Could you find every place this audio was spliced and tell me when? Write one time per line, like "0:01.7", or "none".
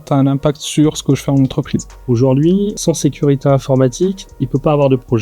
0:01.9
0:04.3

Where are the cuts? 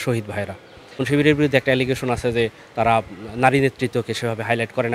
0:01.0

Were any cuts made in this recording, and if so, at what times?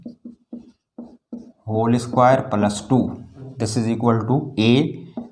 0:03.5

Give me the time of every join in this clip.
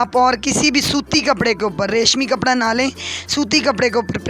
none

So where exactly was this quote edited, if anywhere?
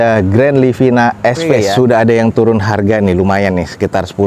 0:01.5

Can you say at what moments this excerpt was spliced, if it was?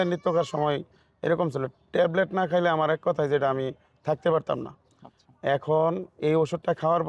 none

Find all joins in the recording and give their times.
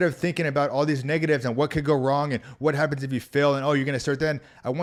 none

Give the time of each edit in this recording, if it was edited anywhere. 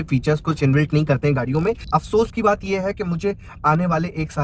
0:01.8

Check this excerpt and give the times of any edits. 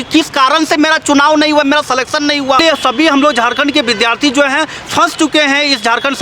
0:02.6

